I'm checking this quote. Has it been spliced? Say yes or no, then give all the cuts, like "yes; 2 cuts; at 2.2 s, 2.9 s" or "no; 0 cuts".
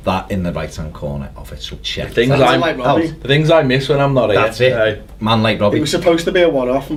no; 0 cuts